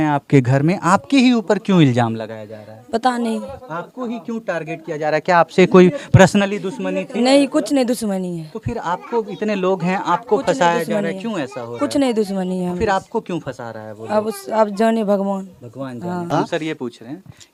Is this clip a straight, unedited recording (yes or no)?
yes